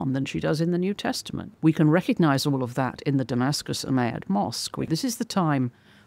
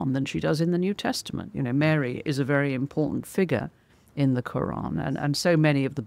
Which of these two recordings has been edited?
first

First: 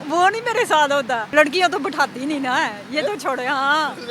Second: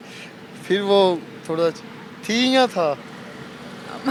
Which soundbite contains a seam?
first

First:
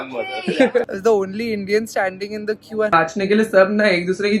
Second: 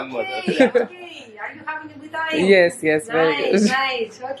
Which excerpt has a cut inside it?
first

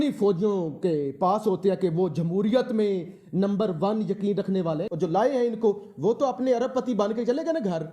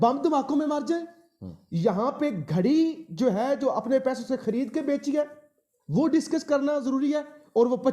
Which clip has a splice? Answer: first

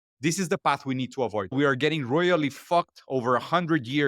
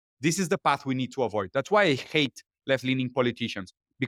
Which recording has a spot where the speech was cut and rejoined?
first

